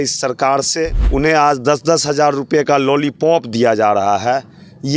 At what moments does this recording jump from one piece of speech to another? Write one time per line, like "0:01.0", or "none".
0:01.0